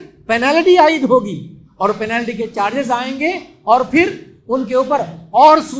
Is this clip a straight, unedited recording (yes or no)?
yes